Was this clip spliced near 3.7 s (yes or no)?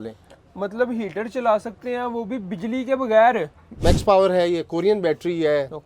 yes